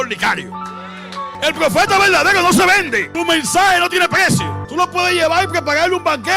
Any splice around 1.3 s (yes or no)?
yes